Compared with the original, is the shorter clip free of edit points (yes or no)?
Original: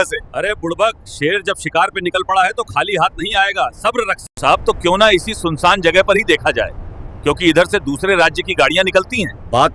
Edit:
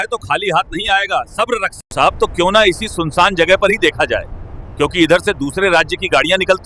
yes